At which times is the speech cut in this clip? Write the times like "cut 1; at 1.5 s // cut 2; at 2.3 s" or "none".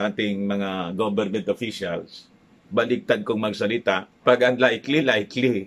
cut 1; at 4.1 s